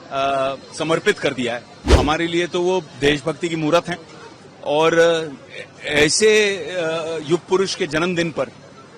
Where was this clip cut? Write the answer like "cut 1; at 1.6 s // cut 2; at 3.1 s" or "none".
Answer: cut 1; at 1.9 s